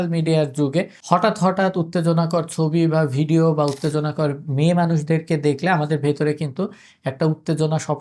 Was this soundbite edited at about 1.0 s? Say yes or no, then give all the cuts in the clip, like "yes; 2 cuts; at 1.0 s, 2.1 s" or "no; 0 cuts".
yes; 1 cut; at 1.0 s